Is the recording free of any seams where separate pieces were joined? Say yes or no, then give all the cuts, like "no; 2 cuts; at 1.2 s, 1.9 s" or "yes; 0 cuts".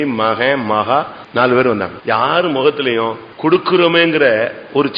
no; 3 cuts; at 1.2 s, 1.9 s, 3.3 s